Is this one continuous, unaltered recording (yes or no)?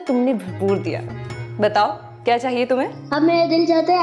no